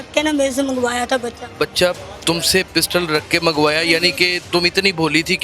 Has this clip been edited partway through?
no; 0 cuts

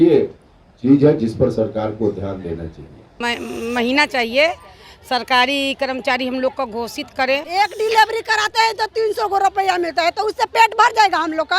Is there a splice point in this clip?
yes; 2 cuts; at 3.2 s, 7.5 s

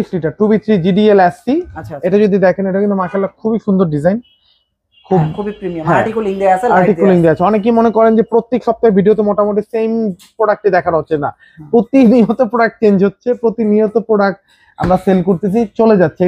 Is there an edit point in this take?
no; 0 cuts

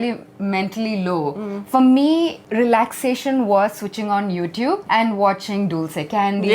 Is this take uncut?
no; 2 cuts; at 2.4 s, 4.8 s

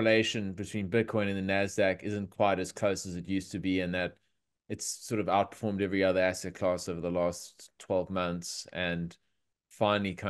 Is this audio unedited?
yes; 0 cuts

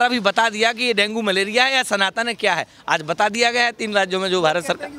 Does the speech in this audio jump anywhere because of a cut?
no; 0 cuts

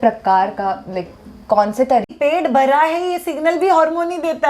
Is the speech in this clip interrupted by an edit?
yes; 1 cut; at 2.1 s

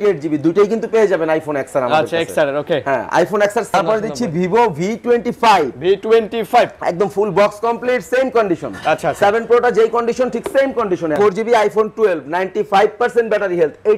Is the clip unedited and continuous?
no; 2 cuts; at 3.7 s, 11.1 s

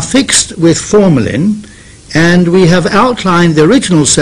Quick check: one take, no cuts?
no; 1 cut; at 2.5 s

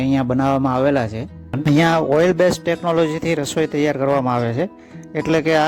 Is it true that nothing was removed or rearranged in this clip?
no; 1 cut; at 1.6 s

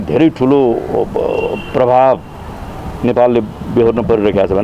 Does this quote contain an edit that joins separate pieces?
no; 0 cuts

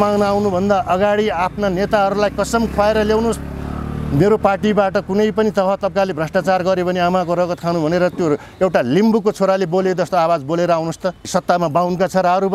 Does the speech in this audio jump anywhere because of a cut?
yes; 1 cut; at 11.2 s

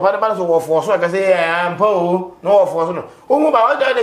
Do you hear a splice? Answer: no; 0 cuts

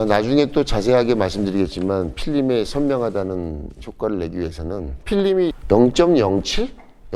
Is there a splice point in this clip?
no; 0 cuts

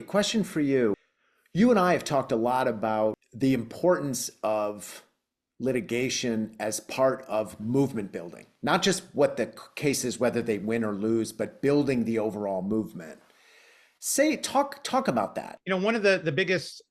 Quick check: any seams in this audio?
yes; 3 cuts; at 1.1 s, 3.3 s, 15.5 s

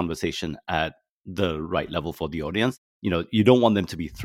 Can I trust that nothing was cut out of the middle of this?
no; 1 cut; at 2.7 s

